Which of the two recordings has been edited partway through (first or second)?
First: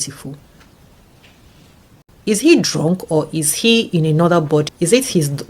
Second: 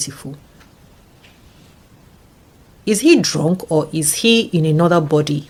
first